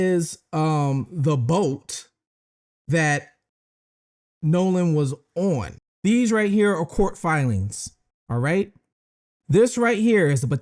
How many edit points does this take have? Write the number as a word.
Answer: one